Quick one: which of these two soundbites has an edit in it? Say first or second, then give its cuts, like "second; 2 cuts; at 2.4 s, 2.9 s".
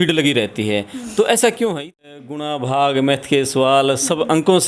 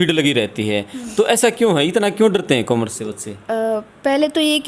first; 1 cut; at 1.9 s